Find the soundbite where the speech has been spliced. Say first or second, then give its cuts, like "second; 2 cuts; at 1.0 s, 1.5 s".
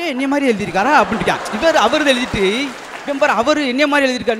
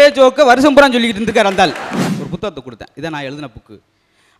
second; 1 cut; at 2.0 s